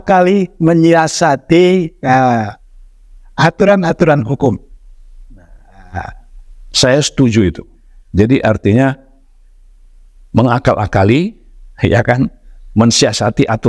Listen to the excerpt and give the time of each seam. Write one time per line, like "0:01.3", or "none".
none